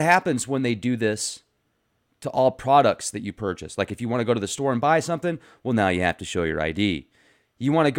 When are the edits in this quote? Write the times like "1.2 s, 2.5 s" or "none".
4.5 s